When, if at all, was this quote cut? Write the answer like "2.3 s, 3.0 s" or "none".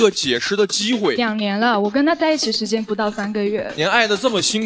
1.2 s, 3.7 s

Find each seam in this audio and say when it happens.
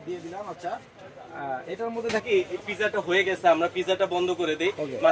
2.2 s

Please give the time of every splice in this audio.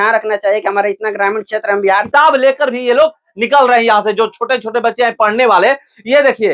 2.1 s

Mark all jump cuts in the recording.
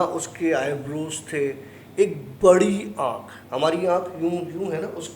3.4 s

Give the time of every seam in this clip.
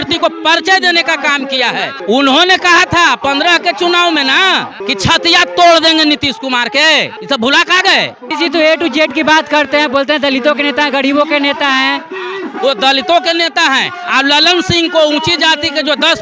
1.9 s, 4.7 s, 7.1 s, 8.2 s

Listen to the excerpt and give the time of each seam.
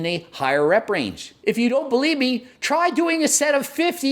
1.2 s

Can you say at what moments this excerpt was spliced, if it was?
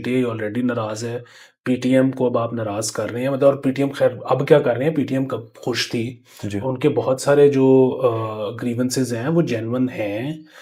none

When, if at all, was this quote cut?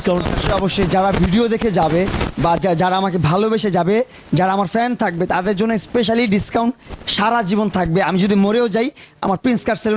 none

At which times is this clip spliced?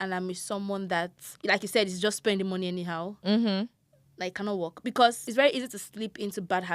1.2 s, 5.2 s

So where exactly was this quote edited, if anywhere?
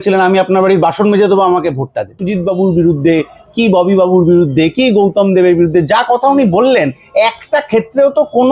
2.2 s

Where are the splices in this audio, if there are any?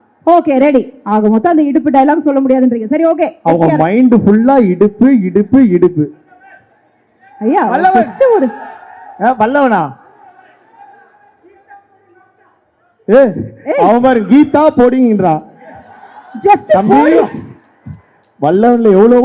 none

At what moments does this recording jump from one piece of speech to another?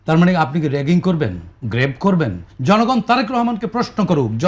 2.5 s

